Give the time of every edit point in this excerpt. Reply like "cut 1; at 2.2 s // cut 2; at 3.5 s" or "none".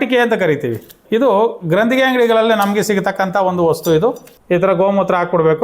cut 1; at 1.0 s // cut 2; at 4.3 s